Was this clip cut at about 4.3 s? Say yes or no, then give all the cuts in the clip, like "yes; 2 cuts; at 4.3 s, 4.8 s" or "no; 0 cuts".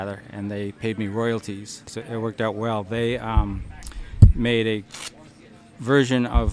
no; 1 cut; at 1.9 s